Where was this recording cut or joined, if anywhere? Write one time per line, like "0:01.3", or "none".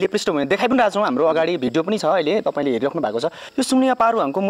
none